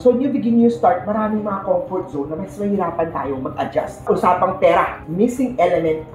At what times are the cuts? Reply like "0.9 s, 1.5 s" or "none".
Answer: 4.0 s